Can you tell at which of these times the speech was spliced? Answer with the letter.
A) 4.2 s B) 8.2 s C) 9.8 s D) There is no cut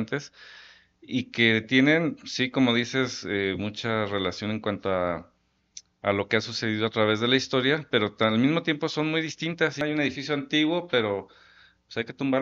C